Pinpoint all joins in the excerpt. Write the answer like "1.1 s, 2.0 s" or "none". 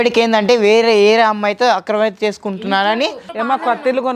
3.2 s